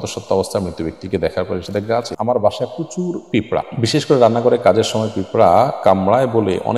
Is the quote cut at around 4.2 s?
no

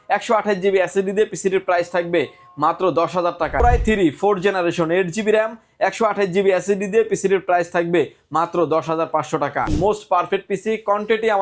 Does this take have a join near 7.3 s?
no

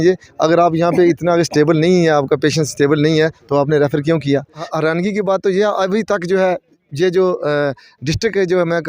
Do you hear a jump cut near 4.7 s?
yes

